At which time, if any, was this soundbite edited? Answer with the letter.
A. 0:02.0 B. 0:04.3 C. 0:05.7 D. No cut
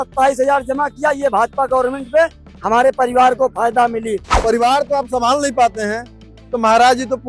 B